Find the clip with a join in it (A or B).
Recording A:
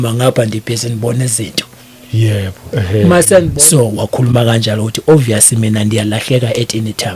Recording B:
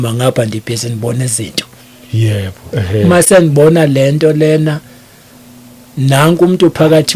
A